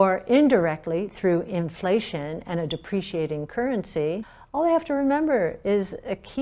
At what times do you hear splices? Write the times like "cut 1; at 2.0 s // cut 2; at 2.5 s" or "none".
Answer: cut 1; at 4.4 s